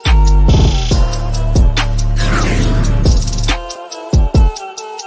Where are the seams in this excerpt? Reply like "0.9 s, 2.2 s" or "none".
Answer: 3.8 s